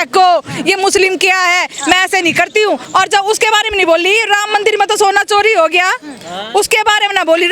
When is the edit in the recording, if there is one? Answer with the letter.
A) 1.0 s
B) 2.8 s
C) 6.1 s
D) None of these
B